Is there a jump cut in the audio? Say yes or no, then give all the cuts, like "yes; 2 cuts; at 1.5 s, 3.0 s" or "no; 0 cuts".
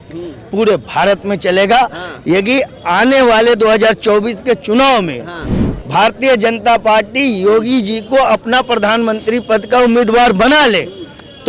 no; 0 cuts